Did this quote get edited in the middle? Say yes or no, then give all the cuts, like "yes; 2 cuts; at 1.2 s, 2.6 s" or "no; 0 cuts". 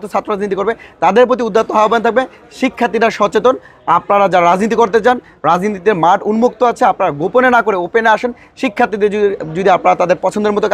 no; 0 cuts